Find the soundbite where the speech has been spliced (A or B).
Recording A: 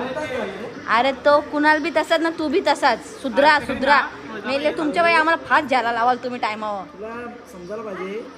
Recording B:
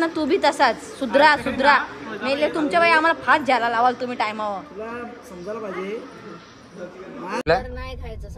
B